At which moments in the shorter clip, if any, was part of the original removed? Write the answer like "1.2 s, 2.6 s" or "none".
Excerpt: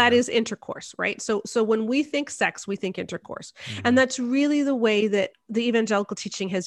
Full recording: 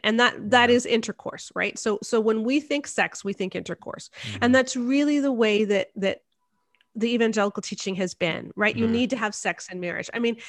5.4 s